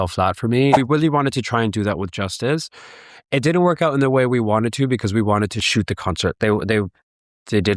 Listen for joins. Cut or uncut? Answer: cut